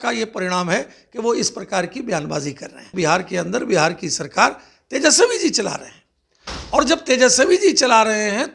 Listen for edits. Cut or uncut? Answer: cut